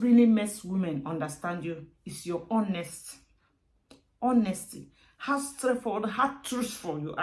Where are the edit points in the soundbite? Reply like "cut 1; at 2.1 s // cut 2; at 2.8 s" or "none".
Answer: none